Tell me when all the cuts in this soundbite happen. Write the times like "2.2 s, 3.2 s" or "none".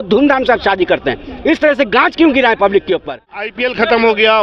3.5 s